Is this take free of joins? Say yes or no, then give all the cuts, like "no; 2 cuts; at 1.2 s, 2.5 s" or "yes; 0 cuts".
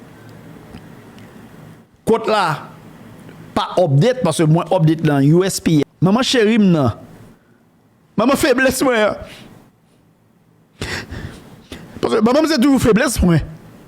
no; 1 cut; at 5.8 s